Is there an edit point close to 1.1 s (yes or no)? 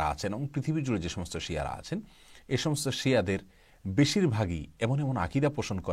no